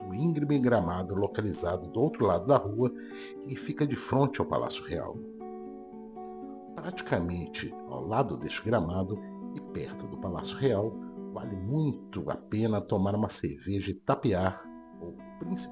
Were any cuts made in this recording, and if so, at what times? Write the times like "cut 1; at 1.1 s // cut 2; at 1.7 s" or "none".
cut 1; at 5.1 s // cut 2; at 6.8 s